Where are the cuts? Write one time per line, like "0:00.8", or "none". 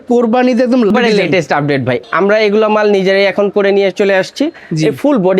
0:00.9
0:02.0